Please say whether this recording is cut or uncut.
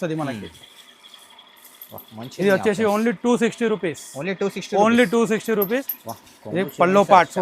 cut